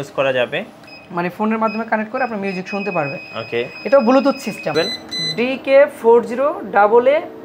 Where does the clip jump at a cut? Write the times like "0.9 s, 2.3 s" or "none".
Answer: 4.7 s